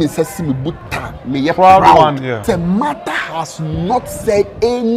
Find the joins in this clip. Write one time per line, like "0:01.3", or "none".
0:02.4